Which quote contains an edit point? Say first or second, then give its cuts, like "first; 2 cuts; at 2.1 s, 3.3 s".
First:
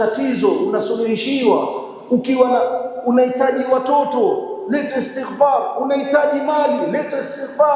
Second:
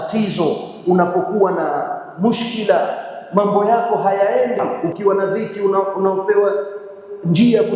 second; 1 cut; at 4.8 s